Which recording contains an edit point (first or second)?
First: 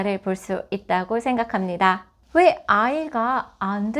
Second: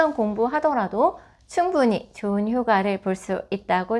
first